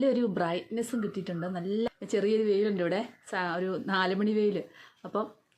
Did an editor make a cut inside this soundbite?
yes; 1 cut; at 1.9 s

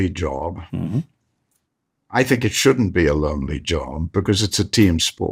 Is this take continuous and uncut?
yes; 0 cuts

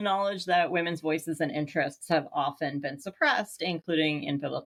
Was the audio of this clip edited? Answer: no; 0 cuts

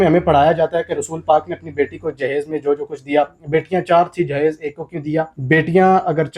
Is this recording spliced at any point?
yes; 1 cut; at 5.4 s

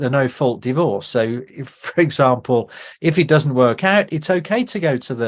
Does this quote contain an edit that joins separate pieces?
no; 0 cuts

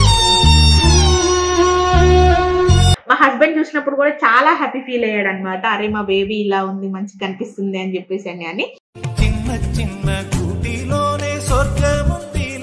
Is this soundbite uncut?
no; 1 cut; at 3.0 s

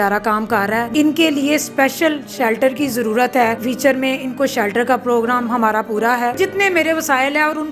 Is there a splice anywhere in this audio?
yes; 3 cuts; at 0.9 s, 3.6 s, 6.4 s

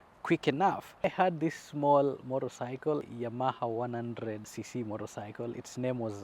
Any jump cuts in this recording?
yes; 3 cuts; at 1.0 s, 3.1 s, 4.5 s

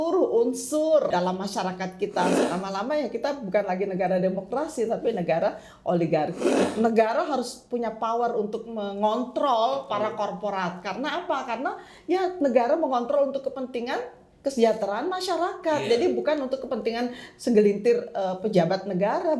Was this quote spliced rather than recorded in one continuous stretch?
yes; 3 cuts; at 1.1 s, 2.4 s, 6.5 s

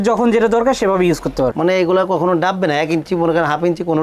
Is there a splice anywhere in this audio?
yes; 1 cut; at 1.5 s

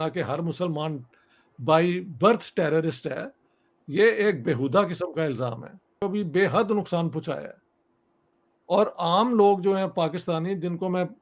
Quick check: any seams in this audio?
yes; 1 cut; at 6.0 s

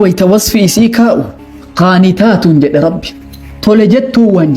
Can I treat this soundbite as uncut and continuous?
no; 1 cut; at 1.4 s

